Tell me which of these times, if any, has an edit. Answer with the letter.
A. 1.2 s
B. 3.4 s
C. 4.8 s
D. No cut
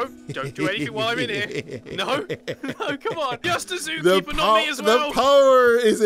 B